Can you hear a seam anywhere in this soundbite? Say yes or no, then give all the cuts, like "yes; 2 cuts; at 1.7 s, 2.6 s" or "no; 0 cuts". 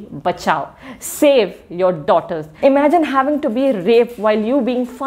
yes; 1 cut; at 2.5 s